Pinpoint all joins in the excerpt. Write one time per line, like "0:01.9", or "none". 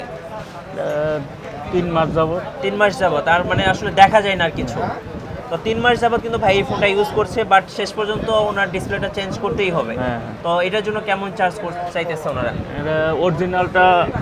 none